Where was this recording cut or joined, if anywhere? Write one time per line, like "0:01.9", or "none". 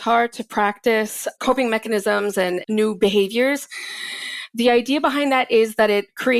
0:01.3
0:02.6